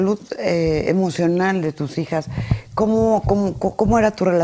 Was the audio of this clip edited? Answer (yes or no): no